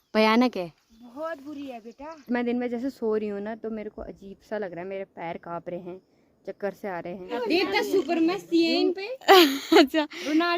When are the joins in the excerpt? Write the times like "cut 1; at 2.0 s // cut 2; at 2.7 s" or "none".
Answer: cut 1; at 2.1 s // cut 2; at 7.3 s